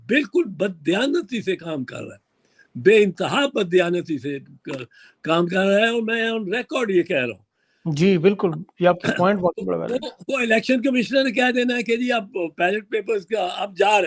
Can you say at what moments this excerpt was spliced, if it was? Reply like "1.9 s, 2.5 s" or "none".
none